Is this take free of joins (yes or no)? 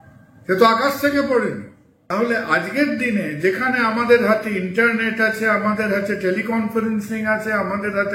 no